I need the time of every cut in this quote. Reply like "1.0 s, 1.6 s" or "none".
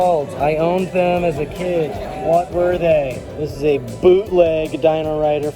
2.1 s, 3.2 s